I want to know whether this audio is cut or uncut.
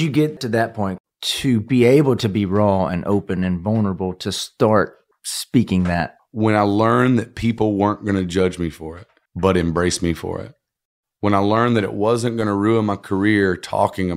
cut